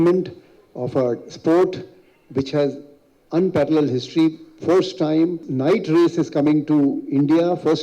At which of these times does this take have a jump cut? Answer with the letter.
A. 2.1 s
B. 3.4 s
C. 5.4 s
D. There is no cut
C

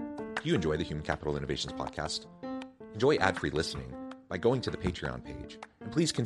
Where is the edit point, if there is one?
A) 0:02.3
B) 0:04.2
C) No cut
C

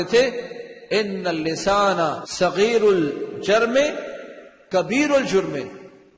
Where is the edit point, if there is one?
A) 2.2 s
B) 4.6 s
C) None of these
A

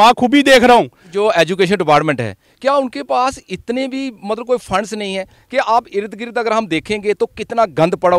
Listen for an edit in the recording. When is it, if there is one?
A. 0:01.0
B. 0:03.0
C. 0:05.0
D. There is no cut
A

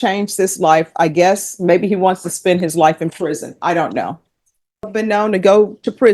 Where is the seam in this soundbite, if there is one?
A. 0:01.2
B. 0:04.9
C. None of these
B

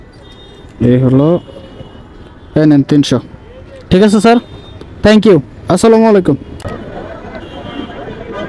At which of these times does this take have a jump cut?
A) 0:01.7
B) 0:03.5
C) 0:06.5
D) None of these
C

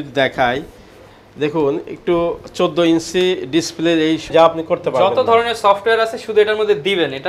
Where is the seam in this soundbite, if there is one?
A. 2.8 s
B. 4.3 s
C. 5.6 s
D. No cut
B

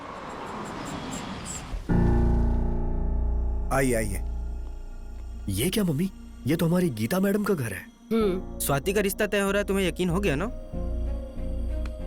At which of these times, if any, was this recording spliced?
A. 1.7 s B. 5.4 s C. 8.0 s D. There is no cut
A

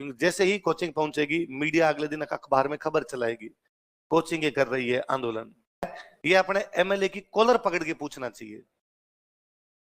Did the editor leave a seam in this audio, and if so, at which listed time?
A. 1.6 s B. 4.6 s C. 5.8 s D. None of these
C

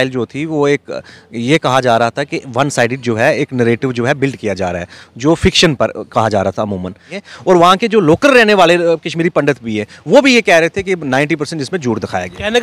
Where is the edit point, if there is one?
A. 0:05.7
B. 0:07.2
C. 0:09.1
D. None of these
B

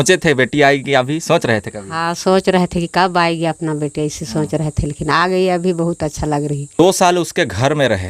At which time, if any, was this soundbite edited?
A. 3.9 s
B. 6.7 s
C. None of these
B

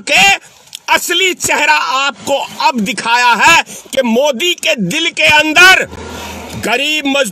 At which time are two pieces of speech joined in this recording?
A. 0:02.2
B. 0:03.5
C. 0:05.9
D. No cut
D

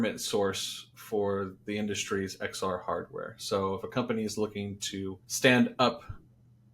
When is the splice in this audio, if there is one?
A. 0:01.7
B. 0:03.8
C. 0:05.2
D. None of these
C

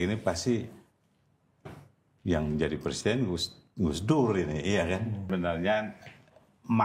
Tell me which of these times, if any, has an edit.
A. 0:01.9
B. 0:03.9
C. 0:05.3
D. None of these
C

